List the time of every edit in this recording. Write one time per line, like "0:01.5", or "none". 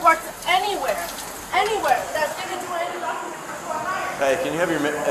none